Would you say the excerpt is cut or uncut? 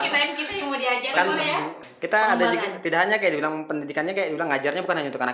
cut